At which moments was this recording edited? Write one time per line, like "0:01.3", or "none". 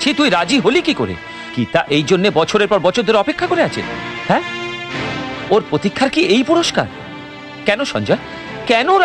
none